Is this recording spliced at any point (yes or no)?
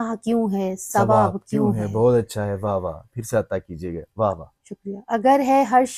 no